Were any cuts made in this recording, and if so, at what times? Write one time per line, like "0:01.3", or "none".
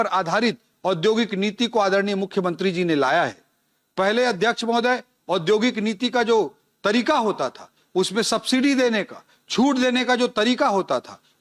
none